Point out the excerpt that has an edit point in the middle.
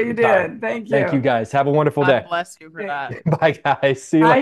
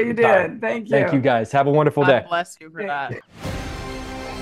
second; 1 cut; at 3.1 s

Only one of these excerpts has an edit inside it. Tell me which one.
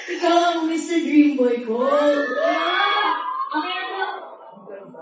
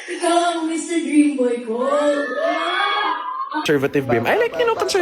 second; 1 cut; at 3.6 s

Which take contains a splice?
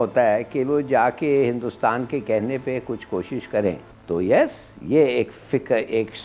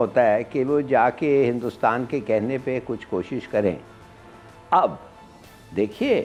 first; 1 cut; at 3.9 s

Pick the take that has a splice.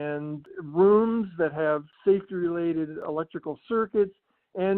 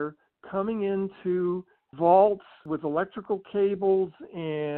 first; 2 cuts; at 1.9 s, 3.0 s

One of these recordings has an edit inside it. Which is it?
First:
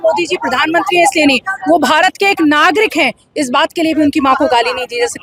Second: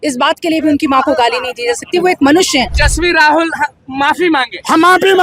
second; 1 cut; at 2.8 s

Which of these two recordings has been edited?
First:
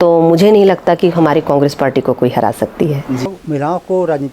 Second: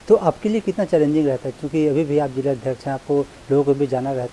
first; 1 cut; at 3.3 s

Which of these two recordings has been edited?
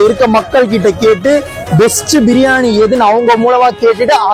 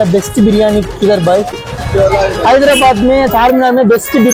second; 1 cut; at 1.7 s

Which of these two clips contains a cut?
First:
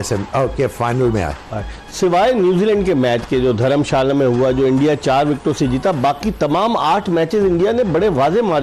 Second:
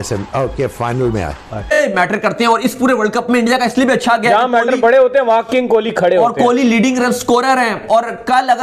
second; 1 cut; at 1.8 s

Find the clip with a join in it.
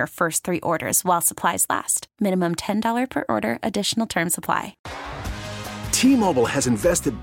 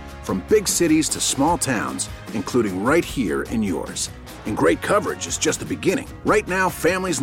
first; 1 cut; at 4.8 s

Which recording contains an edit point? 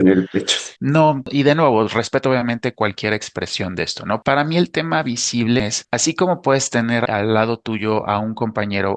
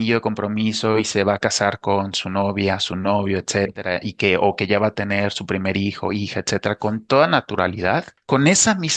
first; 4 cuts; at 1.2 s, 4.2 s, 5.6 s, 7.1 s

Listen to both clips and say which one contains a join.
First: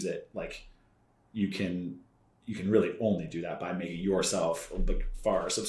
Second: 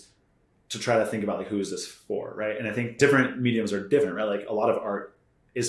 second; 1 cut; at 3.0 s

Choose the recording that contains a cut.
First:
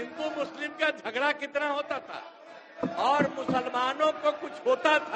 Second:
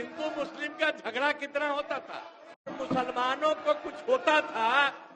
second; 1 cut; at 2.7 s

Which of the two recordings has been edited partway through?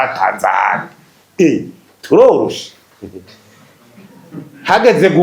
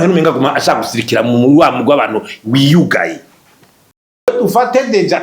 second; 1 cut; at 4.3 s

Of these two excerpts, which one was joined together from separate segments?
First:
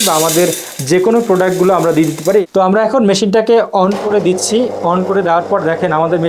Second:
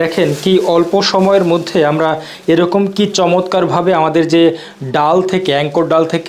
first; 1 cut; at 2.4 s

